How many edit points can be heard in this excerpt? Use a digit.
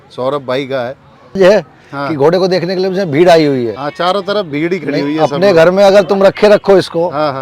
1